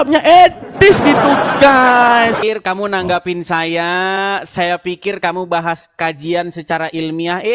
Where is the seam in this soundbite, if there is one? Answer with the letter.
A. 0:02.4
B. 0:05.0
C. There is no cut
A